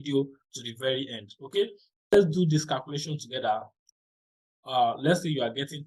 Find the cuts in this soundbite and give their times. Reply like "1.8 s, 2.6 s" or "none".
2.1 s